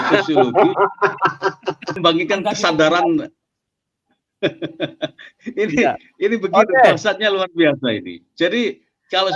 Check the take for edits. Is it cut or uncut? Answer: cut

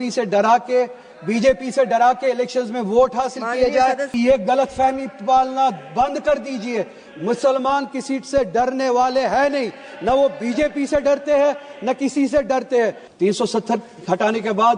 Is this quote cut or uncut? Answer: cut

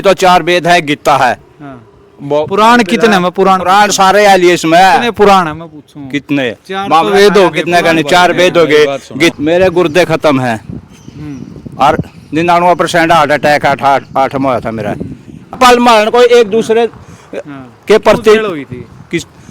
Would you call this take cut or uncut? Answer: cut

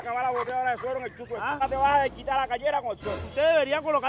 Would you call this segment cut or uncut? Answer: cut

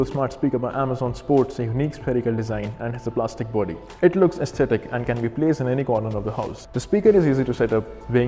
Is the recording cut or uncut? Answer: uncut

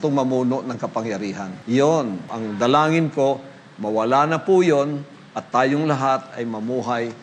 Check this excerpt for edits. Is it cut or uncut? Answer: cut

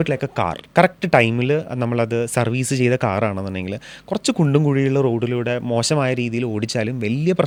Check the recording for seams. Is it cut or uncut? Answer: uncut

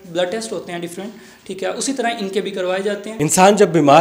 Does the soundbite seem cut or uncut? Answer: cut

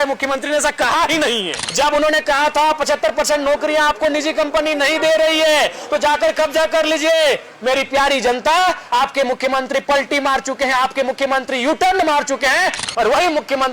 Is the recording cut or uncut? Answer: cut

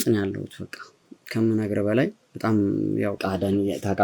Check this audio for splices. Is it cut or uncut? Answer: uncut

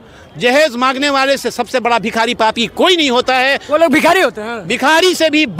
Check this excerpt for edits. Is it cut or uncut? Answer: uncut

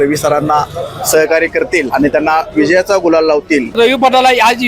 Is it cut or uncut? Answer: cut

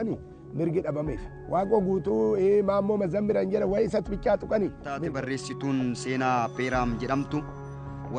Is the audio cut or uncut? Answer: cut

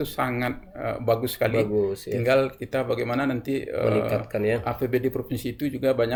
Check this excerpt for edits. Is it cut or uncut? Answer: uncut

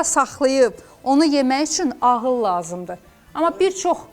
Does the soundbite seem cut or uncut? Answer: uncut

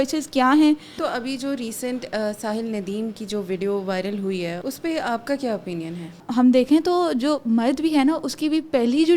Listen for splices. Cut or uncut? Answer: cut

